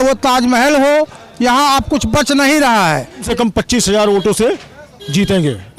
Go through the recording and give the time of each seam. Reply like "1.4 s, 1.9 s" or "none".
3.3 s